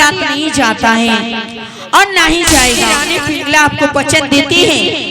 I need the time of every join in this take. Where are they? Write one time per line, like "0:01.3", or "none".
0:03.1